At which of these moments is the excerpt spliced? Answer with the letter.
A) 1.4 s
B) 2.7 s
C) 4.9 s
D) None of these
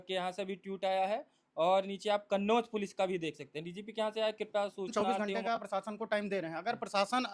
C